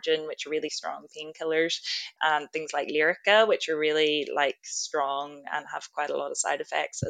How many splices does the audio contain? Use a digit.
1